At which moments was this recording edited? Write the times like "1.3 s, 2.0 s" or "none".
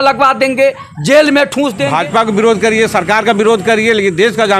1.8 s